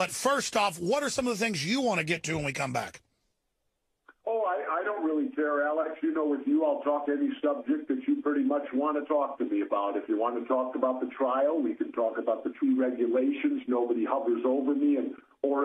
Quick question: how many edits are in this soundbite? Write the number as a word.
zero